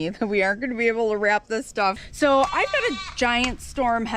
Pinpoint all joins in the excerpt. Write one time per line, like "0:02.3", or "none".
0:02.0